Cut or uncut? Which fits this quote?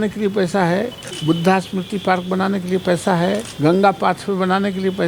cut